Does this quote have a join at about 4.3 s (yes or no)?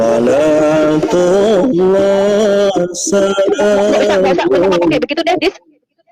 no